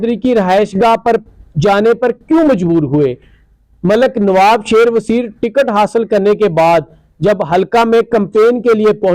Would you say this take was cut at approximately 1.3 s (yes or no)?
no